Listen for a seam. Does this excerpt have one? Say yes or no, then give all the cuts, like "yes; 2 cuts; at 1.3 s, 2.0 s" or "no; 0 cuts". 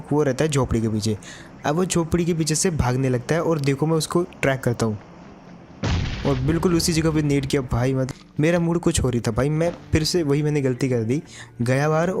yes; 1 cut; at 8.1 s